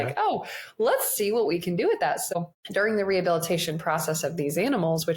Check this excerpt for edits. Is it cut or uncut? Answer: cut